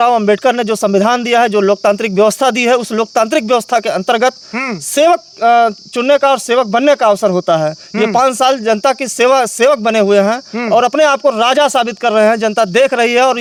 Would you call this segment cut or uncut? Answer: uncut